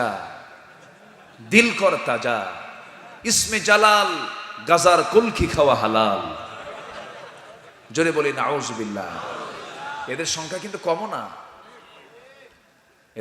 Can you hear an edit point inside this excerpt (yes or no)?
no